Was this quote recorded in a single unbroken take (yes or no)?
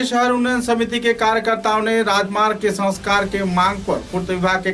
yes